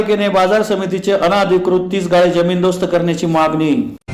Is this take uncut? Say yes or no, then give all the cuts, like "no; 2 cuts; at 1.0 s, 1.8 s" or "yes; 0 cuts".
yes; 0 cuts